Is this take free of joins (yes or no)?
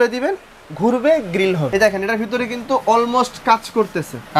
no